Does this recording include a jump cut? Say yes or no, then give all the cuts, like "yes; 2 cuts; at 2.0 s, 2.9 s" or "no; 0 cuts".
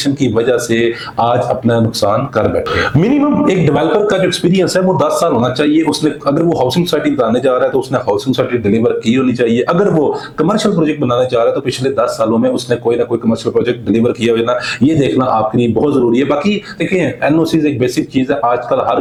no; 0 cuts